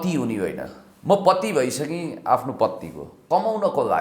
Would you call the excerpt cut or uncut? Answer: cut